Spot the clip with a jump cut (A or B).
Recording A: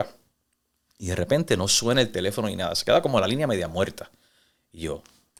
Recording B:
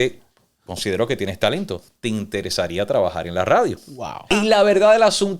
B